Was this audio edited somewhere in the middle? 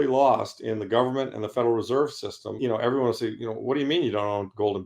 yes; 1 cut; at 2.5 s

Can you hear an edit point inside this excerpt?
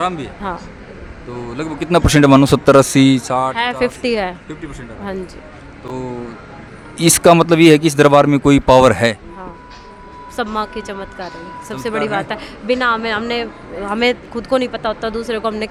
no; 0 cuts

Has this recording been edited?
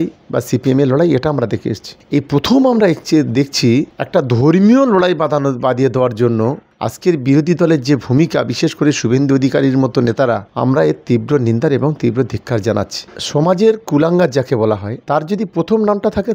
yes; 1 cut; at 13.2 s

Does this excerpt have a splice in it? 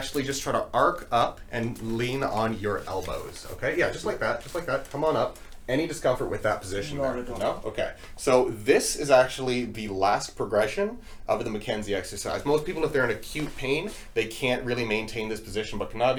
no; 0 cuts

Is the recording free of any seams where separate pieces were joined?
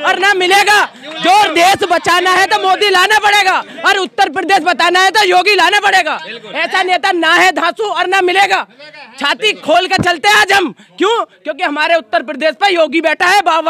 yes; 0 cuts

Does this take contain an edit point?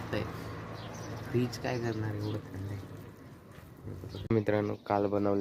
yes; 1 cut; at 4.3 s

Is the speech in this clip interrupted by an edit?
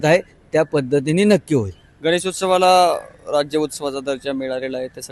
no; 0 cuts

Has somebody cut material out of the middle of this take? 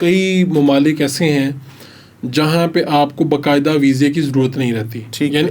no; 0 cuts

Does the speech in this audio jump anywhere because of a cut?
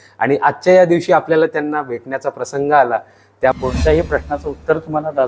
yes; 1 cut; at 3.5 s

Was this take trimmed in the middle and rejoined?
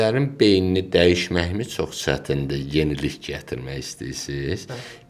no; 0 cuts

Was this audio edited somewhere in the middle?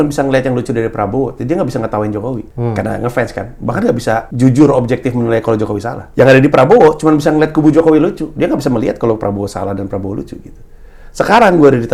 yes; 3 cuts; at 2.5 s, 4.3 s, 6.0 s

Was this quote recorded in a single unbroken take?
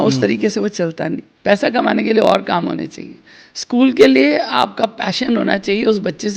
no; 1 cut; at 1.3 s

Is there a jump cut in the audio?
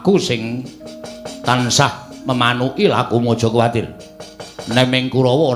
no; 0 cuts

